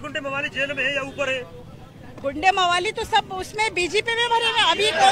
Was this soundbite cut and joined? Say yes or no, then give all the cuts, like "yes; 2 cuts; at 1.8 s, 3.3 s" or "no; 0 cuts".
no; 0 cuts